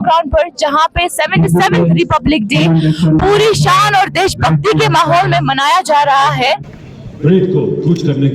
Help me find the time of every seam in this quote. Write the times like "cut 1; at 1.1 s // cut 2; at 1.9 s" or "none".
cut 1; at 6.7 s